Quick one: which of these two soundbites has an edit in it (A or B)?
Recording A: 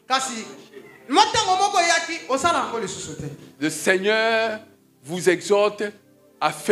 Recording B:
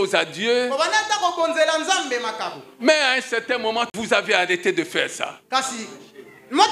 B